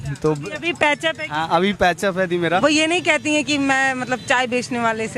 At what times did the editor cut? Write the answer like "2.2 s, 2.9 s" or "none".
2.6 s